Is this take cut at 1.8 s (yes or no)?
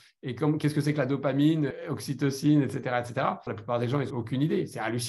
yes